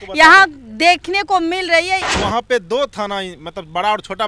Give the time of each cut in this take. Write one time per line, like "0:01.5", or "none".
0:02.1